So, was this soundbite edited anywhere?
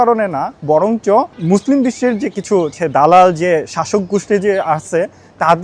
yes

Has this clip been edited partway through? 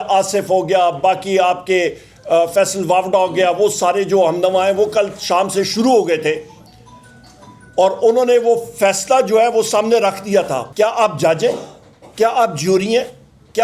yes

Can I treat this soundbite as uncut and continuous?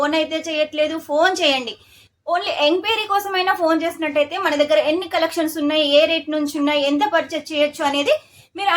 yes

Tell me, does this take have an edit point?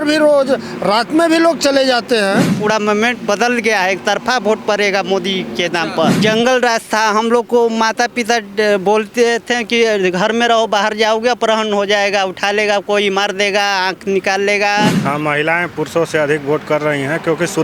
yes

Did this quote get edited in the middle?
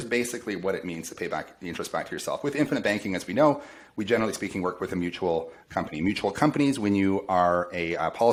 no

